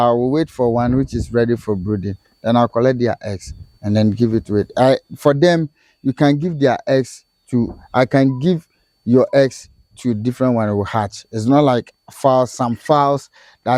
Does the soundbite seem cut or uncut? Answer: uncut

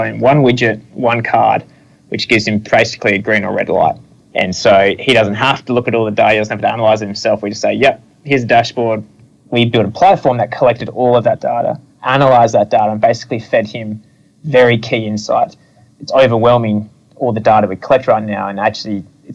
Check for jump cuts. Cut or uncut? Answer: cut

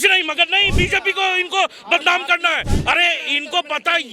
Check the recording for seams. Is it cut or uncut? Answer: uncut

